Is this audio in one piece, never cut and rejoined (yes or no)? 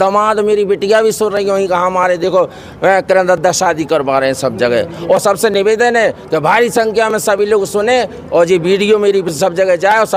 yes